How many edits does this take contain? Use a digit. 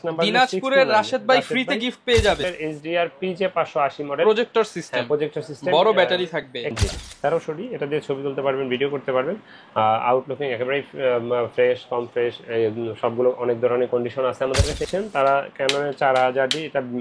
3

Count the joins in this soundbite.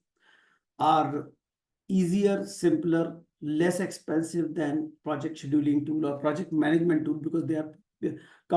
0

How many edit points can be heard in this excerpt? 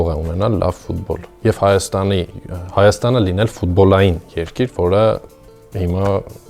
0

